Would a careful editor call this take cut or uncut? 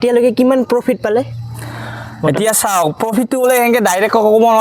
uncut